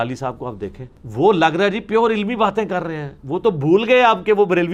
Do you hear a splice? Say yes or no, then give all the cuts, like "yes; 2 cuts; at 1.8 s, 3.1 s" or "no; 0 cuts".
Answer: no; 0 cuts